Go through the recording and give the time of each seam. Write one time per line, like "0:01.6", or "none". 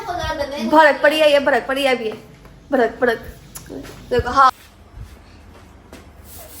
0:04.5